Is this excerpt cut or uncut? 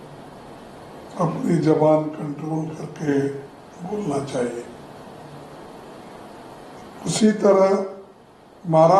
uncut